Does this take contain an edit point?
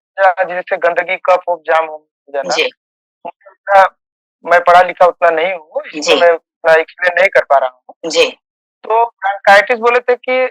no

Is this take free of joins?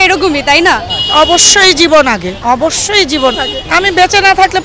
no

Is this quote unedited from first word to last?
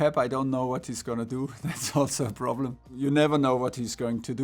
no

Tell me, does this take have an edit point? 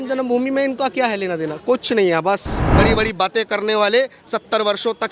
yes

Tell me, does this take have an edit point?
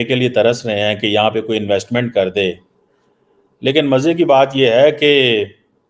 no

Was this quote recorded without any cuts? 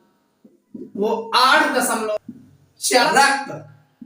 no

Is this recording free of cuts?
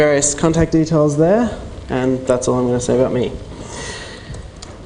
no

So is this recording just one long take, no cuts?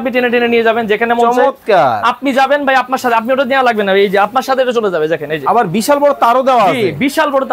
yes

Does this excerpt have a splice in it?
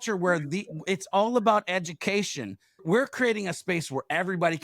yes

